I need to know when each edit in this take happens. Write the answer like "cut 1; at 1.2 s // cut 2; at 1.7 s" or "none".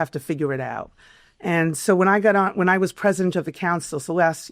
none